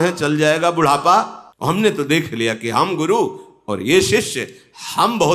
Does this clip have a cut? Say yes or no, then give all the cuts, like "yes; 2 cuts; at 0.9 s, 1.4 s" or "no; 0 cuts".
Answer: yes; 1 cut; at 1.4 s